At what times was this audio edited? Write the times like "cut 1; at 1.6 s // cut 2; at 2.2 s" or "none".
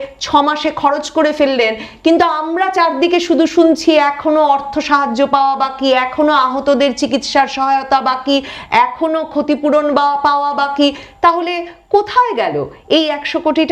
none